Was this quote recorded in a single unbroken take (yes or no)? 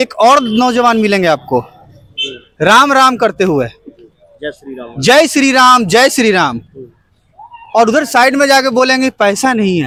yes